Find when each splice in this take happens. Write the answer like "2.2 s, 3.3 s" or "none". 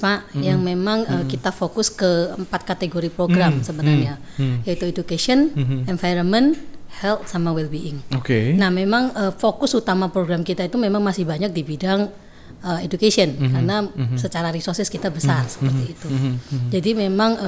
none

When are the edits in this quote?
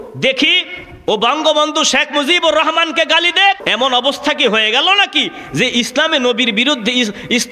3.6 s

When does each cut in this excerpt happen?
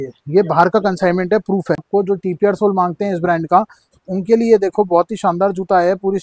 1.9 s

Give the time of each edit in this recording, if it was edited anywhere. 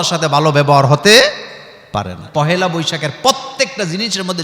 2.3 s

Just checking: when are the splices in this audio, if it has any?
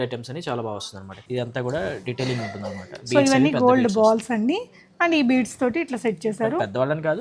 1.2 s

